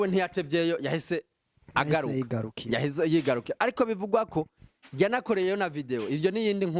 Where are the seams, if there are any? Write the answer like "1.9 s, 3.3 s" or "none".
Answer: none